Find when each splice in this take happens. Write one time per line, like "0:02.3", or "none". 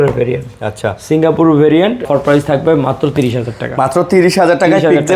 0:02.1